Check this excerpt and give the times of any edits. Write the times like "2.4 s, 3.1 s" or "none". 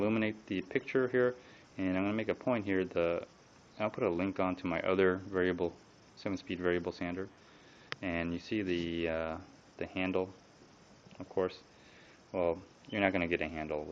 3.1 s